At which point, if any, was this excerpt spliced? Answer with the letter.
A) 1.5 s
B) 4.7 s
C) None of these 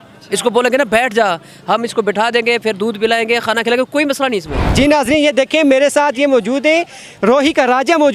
B